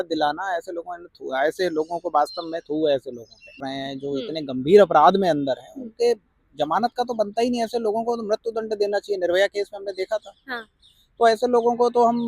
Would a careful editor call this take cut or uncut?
cut